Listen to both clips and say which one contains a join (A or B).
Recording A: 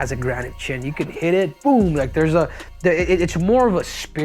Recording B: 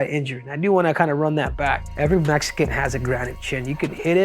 B